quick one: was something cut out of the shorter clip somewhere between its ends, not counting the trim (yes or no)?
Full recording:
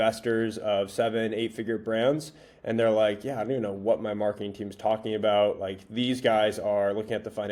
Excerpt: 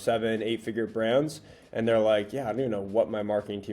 no